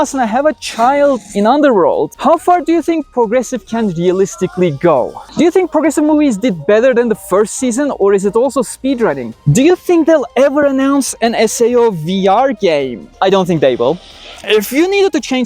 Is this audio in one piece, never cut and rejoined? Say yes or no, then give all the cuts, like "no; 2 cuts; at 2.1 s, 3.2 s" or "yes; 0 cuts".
no; 4 cuts; at 2.1 s, 5.2 s, 9.3 s, 14.4 s